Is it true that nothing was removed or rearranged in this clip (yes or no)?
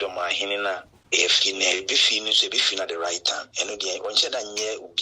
no